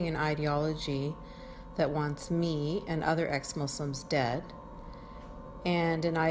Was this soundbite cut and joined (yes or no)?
yes